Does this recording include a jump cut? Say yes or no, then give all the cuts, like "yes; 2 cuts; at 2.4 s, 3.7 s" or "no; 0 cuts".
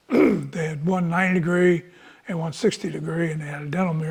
no; 0 cuts